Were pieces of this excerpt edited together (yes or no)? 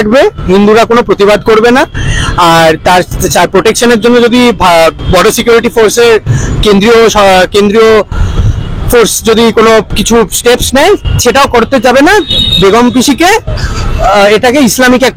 no